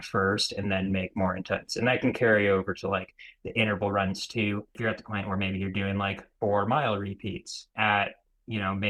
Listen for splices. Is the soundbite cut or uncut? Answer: cut